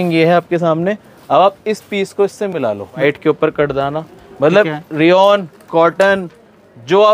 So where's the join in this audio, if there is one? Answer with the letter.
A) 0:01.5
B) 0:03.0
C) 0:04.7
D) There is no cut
B